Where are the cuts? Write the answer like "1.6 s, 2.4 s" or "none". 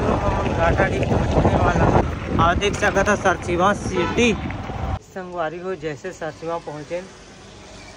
2.0 s, 5.0 s